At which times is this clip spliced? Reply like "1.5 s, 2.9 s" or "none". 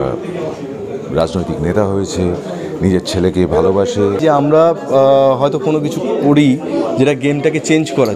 4.2 s